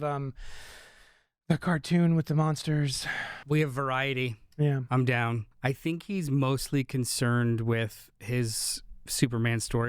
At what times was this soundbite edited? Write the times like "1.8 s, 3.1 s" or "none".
3.4 s, 5.5 s